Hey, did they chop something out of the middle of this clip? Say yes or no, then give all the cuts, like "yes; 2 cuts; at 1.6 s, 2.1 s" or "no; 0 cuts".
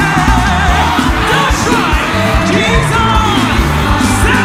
no; 0 cuts